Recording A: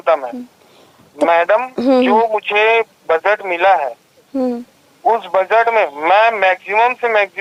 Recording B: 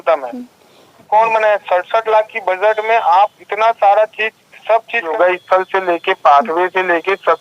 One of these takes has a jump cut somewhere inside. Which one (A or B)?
B